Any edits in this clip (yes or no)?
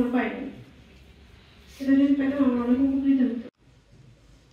no